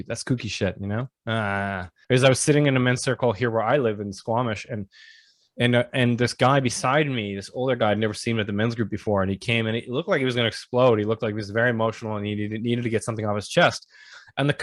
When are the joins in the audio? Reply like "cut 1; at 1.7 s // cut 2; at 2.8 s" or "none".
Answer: cut 1; at 1.9 s